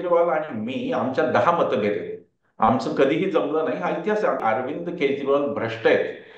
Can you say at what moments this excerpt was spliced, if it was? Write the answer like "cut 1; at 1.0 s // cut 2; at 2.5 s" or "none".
cut 1; at 4.4 s